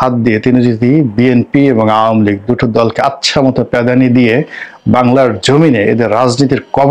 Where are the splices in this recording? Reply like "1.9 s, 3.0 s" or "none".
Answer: none